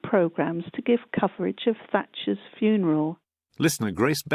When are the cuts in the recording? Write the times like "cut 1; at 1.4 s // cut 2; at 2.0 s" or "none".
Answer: cut 1; at 2.8 s

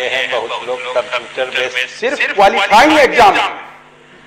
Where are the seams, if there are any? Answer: cut 1; at 1.8 s

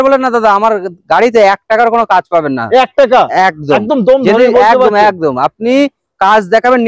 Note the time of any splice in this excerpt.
none

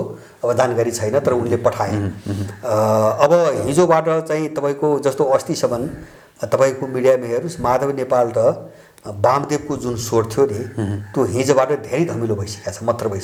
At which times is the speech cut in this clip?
none

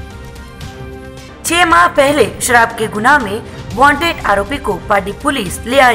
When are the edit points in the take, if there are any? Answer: cut 1; at 1.2 s

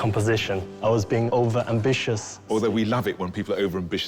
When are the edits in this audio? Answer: cut 1; at 0.9 s // cut 2; at 2.4 s

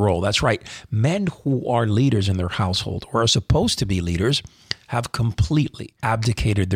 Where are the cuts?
cut 1; at 5.8 s

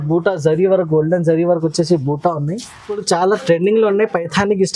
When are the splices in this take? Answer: cut 1; at 2.9 s

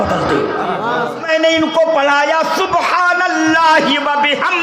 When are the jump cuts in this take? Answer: cut 1; at 1.2 s

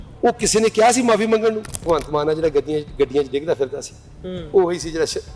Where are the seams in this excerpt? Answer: cut 1; at 1.8 s

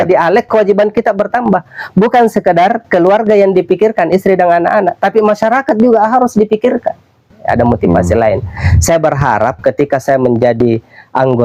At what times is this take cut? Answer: cut 1; at 7.3 s

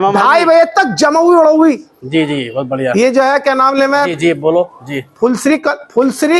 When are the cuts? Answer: none

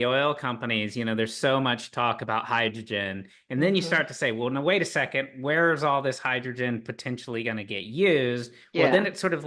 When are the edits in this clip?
none

